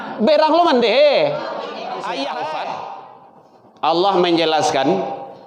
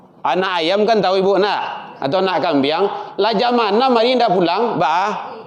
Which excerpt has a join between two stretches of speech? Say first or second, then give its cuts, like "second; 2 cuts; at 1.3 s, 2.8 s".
first; 1 cut; at 2.8 s